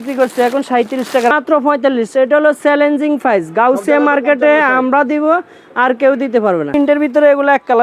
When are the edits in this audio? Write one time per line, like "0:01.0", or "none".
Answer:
0:01.3
0:06.7